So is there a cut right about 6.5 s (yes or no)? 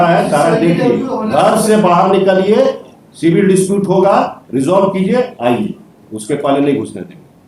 no